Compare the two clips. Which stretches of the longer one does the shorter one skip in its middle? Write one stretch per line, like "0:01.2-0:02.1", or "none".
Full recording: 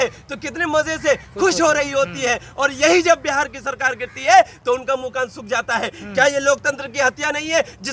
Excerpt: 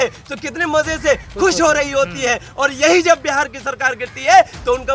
none